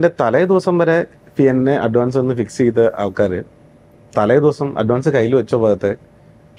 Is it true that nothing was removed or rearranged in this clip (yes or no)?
yes